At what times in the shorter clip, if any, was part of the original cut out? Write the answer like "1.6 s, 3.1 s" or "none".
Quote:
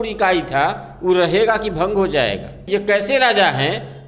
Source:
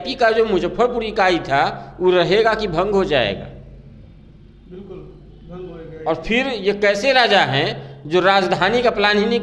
2.6 s